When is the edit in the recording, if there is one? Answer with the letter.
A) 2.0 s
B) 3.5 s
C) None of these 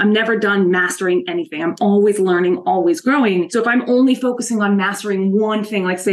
B